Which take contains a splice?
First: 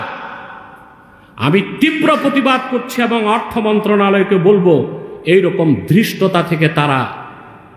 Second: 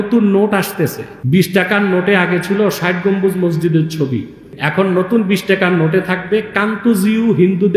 second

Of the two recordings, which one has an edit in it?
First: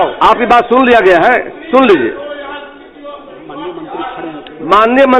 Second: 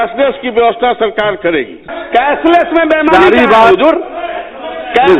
second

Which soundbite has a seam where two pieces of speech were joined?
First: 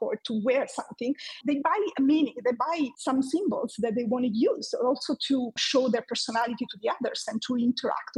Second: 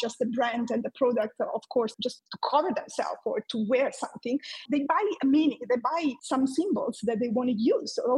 second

